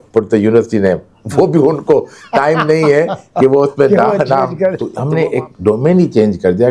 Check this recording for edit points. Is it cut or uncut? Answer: cut